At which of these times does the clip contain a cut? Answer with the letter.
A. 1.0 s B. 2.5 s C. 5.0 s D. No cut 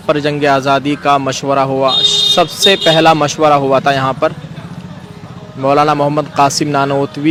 D